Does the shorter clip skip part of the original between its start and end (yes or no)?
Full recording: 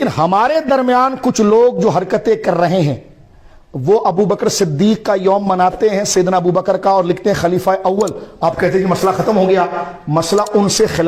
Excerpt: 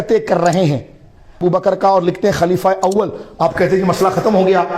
yes